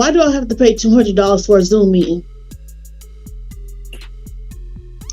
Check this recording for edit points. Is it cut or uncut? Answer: uncut